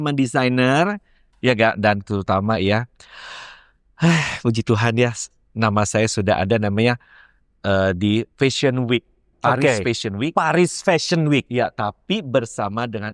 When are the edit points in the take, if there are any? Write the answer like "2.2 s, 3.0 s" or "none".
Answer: none